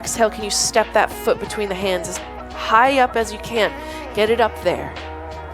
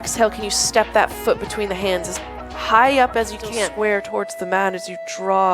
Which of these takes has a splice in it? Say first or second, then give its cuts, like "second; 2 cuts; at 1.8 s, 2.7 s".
second; 1 cut; at 3.7 s